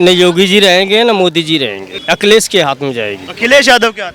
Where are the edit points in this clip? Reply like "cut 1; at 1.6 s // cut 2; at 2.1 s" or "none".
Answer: cut 1; at 1.9 s